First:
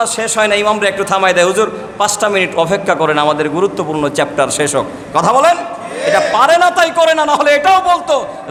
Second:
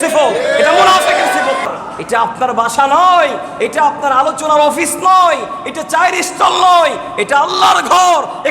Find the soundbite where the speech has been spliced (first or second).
second